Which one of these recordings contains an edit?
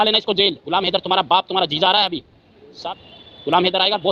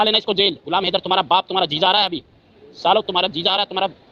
first; 1 cut; at 2.8 s

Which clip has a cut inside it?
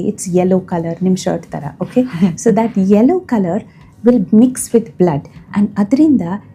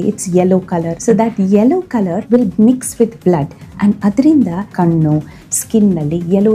second; 3 cuts; at 1.0 s, 2.2 s, 4.7 s

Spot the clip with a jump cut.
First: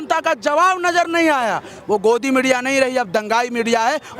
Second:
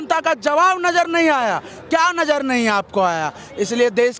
first; 1 cut; at 1.8 s

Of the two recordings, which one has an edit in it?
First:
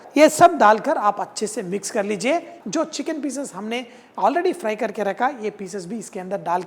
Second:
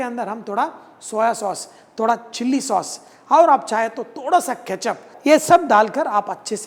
first; 1 cut; at 2.6 s

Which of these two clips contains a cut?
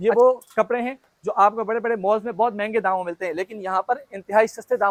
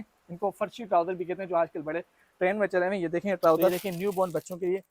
second; 1 cut; at 3.8 s

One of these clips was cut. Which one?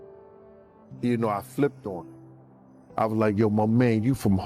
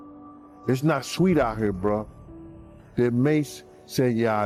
first; 1 cut; at 1.0 s

